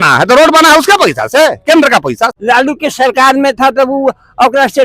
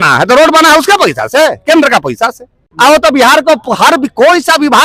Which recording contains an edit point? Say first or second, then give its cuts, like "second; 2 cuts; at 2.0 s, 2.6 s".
first; 1 cut; at 2.3 s